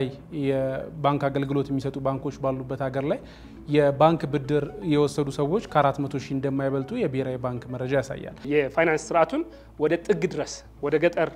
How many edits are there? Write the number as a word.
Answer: one